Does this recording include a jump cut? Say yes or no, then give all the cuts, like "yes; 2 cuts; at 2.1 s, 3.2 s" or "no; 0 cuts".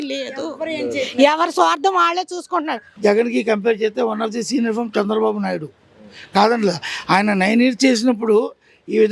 yes; 1 cut; at 2.8 s